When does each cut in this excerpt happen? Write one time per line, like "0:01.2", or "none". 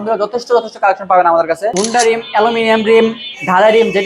0:01.7